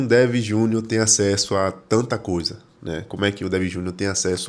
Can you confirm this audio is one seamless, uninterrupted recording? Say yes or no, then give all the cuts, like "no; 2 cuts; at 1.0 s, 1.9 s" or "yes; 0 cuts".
yes; 0 cuts